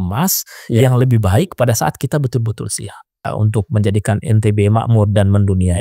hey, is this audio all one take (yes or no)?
no